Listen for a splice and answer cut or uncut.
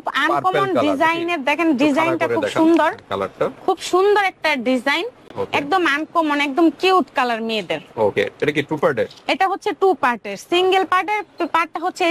uncut